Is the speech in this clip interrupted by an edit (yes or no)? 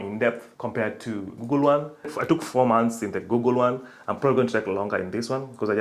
yes